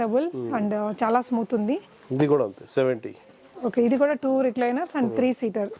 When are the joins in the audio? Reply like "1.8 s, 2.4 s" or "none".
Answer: none